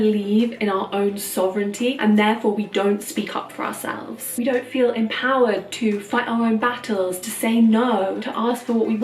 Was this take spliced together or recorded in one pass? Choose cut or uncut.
uncut